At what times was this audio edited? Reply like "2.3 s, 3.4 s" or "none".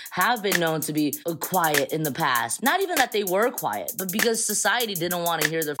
1.2 s, 2.5 s